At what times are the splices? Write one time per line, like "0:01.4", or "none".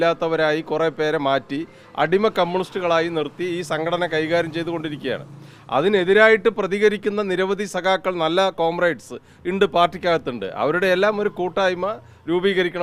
none